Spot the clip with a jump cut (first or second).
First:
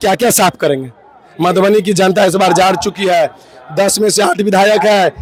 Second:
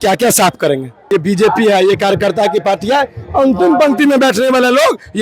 second